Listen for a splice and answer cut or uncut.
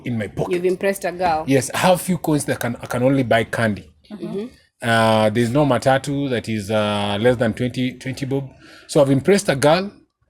uncut